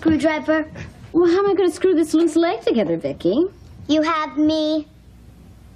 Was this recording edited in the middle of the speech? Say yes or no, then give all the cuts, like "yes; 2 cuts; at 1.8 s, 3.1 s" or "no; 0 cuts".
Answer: no; 0 cuts